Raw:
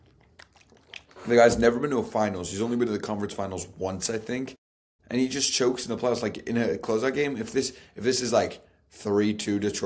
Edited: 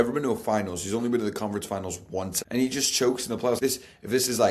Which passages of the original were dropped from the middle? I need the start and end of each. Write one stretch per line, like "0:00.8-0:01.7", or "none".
0:04.0-0:04.9
0:06.2-0:07.5